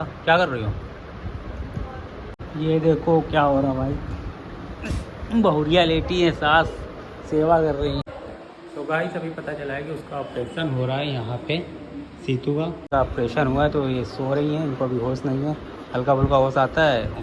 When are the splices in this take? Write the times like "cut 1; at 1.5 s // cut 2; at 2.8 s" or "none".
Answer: cut 1; at 2.3 s // cut 2; at 8.0 s // cut 3; at 12.9 s